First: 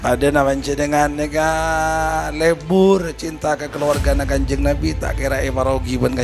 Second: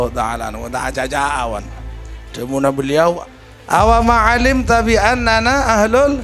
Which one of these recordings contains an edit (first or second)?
second